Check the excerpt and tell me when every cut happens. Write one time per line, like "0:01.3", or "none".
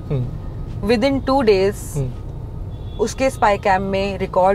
none